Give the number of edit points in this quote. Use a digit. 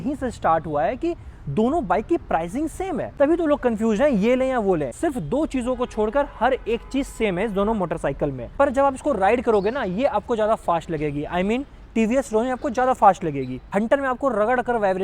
4